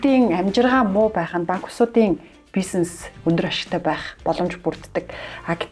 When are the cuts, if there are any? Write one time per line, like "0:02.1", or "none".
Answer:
none